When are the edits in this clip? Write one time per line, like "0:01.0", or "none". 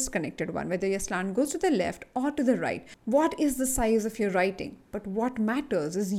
none